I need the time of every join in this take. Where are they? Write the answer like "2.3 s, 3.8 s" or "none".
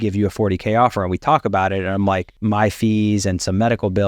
2.3 s